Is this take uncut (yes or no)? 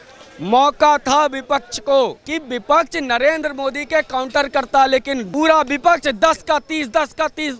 no